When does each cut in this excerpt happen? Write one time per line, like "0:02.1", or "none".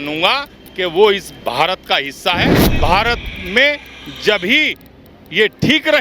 0:02.6